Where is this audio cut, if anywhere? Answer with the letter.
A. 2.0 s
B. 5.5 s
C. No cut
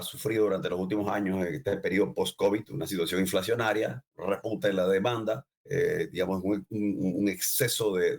B